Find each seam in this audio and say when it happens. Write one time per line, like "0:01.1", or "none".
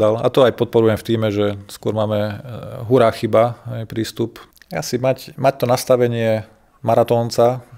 0:04.5